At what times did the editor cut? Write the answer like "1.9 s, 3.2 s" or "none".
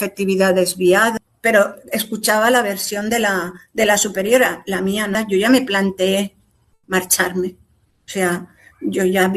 1.2 s, 5.2 s